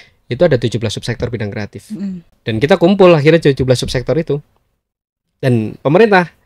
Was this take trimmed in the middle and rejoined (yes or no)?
yes